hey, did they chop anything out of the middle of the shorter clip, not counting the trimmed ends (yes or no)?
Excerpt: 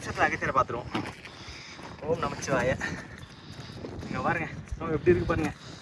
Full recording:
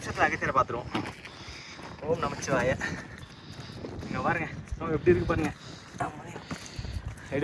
no